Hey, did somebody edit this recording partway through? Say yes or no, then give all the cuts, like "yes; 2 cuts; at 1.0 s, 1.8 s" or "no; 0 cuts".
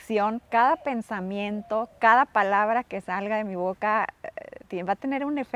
no; 0 cuts